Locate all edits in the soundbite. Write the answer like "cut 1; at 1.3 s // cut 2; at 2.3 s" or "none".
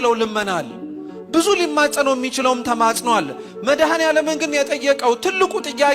none